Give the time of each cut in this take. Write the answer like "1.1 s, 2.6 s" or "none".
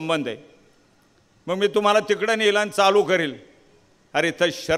none